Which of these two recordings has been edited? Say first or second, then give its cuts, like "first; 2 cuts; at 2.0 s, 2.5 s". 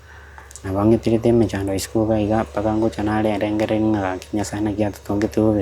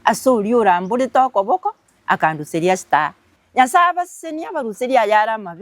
second; 1 cut; at 3.2 s